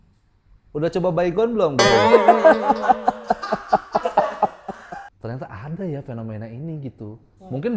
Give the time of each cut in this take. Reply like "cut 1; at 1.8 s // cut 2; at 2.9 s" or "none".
cut 1; at 5.1 s